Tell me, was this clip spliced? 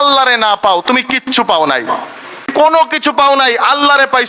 yes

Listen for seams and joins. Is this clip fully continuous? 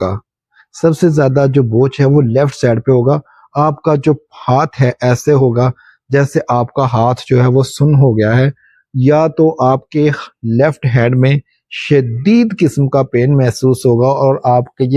yes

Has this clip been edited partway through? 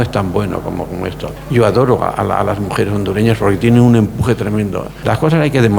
yes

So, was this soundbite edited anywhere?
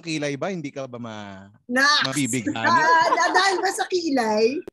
no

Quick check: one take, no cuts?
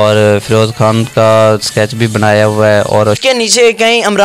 no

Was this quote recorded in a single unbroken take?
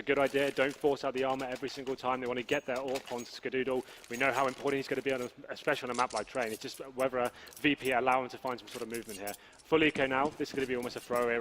no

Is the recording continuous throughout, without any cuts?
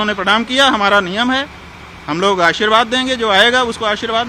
yes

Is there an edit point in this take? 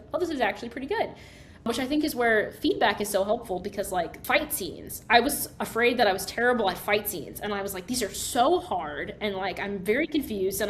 yes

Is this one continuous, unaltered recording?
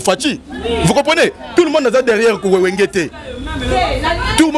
yes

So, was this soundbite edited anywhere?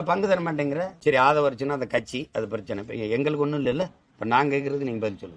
yes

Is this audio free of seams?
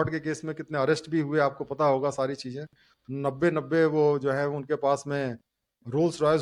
yes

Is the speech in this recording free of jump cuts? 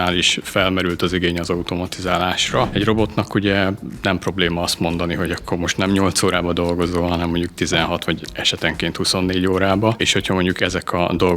no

